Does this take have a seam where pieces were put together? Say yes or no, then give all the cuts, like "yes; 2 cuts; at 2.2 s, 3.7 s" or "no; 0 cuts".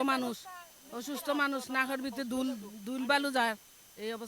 no; 0 cuts